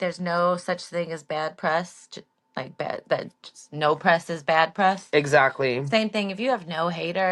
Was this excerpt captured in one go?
yes; 0 cuts

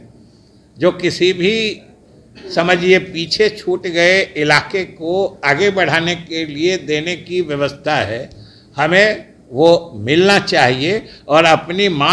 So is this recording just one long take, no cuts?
no; 1 cut; at 11.1 s

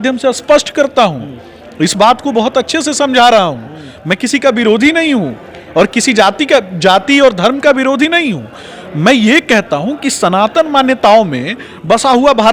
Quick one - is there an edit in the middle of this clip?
no; 0 cuts

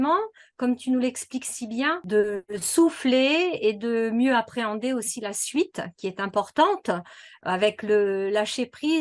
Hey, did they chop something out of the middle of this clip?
yes; 1 cut; at 2.0 s

